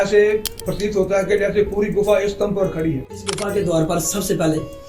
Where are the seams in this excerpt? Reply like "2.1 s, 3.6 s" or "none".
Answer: 3.3 s